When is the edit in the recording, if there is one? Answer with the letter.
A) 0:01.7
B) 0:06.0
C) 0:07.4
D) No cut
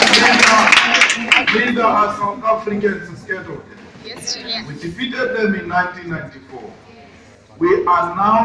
B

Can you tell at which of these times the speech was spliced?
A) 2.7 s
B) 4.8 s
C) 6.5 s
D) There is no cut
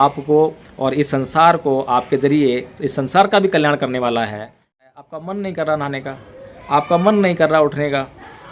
B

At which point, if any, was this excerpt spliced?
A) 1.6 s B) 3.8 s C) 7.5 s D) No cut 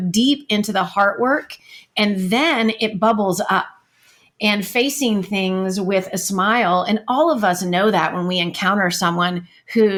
D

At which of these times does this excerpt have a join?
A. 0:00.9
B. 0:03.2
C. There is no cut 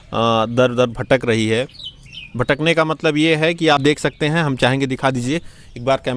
C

